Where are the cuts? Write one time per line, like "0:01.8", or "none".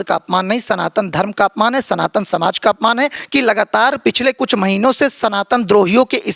0:03.2